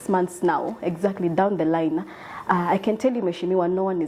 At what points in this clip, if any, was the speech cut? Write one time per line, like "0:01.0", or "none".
none